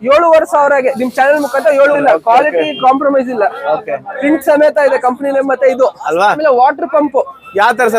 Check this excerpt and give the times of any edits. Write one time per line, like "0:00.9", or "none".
0:02.0
0:06.4